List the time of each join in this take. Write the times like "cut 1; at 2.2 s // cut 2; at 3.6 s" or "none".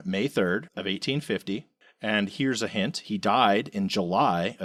none